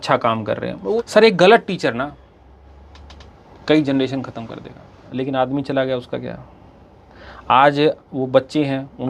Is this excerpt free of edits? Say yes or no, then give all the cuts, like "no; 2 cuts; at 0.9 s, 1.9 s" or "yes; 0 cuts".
no; 2 cuts; at 1.0 s, 5.1 s